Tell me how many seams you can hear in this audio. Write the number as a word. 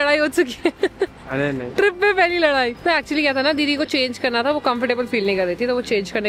zero